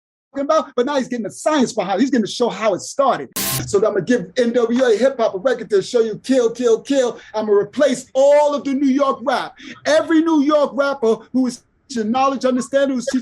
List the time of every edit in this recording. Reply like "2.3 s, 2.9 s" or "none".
3.5 s